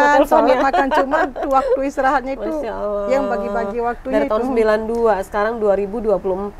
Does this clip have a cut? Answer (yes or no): no